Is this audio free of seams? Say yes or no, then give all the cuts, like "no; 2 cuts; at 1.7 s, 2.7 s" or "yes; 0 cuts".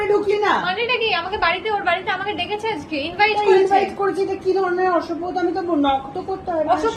yes; 0 cuts